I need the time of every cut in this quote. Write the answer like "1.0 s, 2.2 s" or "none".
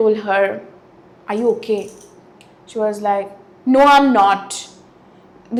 none